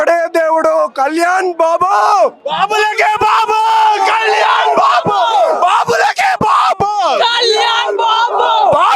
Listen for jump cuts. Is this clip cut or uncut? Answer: uncut